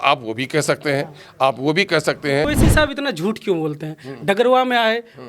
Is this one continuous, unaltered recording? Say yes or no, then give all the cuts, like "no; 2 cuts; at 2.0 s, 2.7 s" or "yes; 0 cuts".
no; 1 cut; at 2.4 s